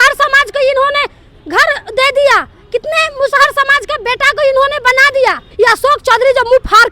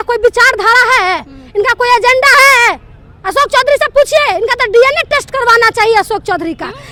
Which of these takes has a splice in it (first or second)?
first